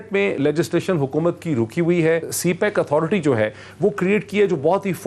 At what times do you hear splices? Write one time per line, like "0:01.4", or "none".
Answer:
0:02.3